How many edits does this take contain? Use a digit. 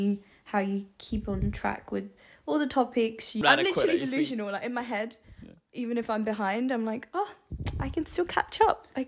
1